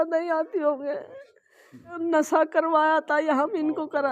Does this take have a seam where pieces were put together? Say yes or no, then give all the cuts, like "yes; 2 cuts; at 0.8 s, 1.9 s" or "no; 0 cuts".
yes; 1 cut; at 2.0 s